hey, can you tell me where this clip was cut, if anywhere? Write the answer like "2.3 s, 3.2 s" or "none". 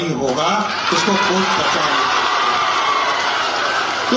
none